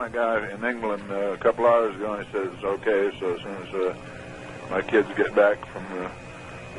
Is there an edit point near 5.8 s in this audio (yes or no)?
yes